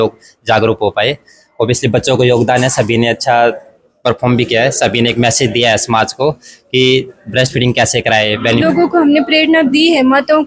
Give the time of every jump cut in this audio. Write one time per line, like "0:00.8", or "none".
0:08.6